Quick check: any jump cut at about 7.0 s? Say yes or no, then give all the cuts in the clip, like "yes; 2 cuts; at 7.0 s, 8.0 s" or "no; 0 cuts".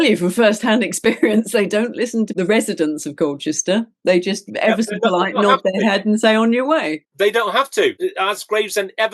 yes; 3 cuts; at 2.3 s, 7.0 s, 8.0 s